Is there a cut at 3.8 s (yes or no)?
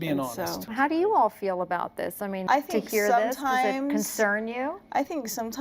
no